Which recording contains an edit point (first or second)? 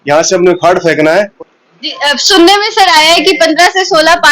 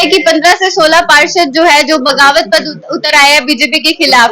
first